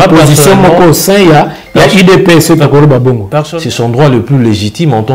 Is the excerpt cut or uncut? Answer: cut